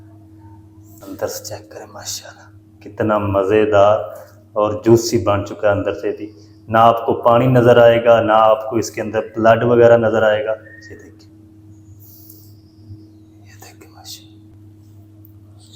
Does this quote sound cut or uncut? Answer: cut